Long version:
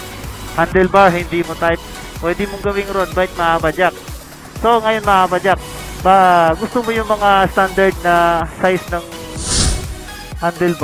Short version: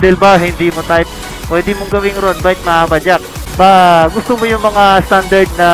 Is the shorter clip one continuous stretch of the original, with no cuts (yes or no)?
no